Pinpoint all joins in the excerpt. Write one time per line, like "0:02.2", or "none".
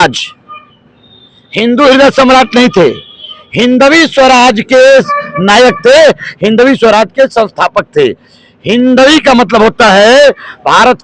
none